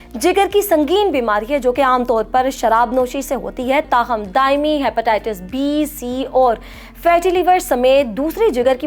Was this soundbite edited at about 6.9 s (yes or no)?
no